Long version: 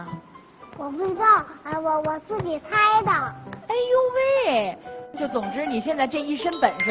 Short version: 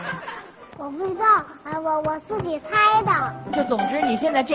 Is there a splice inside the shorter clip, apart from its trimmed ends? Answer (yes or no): yes